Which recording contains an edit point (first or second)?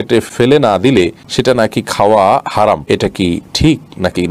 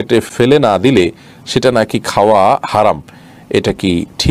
first